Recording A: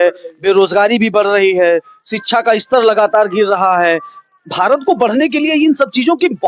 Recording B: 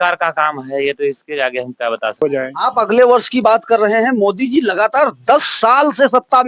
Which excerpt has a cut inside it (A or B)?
B